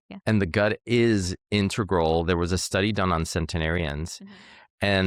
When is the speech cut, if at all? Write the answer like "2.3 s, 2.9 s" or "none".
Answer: none

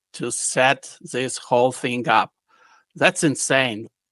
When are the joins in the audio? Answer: none

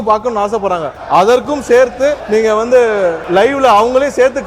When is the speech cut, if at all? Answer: 0.9 s, 2.2 s, 3.2 s

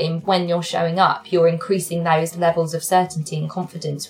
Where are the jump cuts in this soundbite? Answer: none

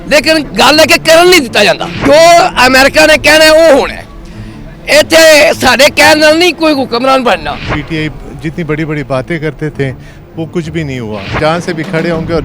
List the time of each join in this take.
1.9 s, 7.8 s, 11.4 s

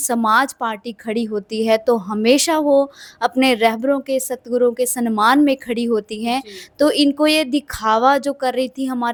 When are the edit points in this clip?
none

